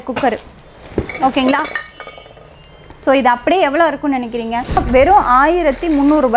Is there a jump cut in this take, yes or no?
yes